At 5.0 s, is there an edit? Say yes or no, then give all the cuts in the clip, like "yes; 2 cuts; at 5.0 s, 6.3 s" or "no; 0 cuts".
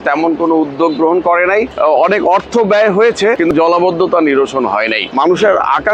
yes; 3 cuts; at 1.7 s, 3.5 s, 5.0 s